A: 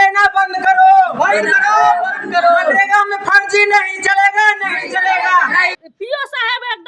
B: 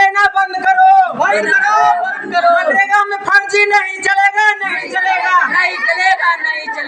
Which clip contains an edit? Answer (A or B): A